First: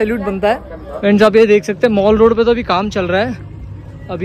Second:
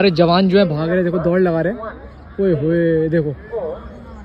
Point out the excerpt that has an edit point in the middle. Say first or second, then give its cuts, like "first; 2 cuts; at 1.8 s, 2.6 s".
first; 1 cut; at 1.0 s